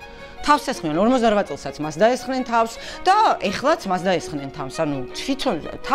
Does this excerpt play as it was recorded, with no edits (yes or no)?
yes